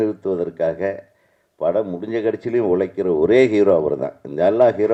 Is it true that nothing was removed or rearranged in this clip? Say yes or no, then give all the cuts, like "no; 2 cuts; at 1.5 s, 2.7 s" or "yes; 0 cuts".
yes; 0 cuts